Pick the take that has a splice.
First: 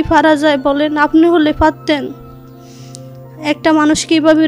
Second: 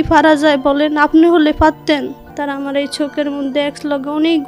second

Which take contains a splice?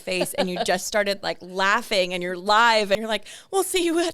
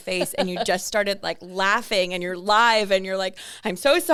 first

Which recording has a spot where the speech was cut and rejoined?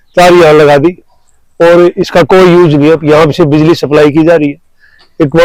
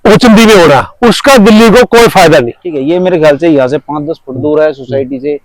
second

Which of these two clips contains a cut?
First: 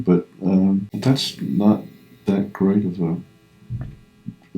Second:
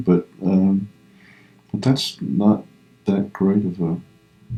first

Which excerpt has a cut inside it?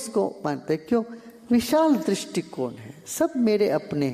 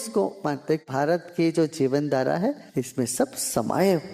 second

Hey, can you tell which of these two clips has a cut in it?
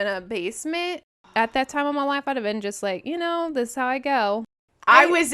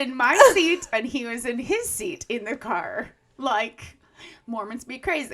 first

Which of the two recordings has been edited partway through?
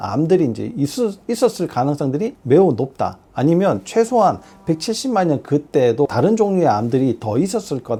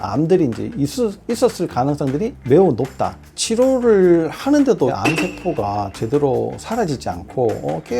second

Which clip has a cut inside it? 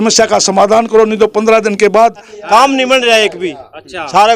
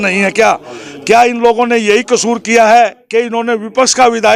first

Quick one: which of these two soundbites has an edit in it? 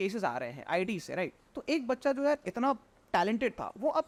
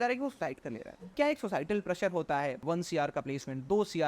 second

